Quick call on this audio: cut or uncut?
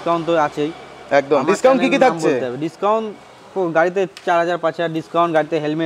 uncut